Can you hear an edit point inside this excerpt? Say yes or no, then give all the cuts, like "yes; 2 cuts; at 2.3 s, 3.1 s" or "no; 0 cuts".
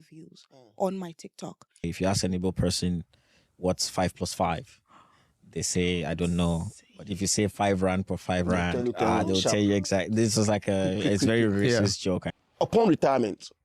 yes; 2 cuts; at 1.9 s, 12.3 s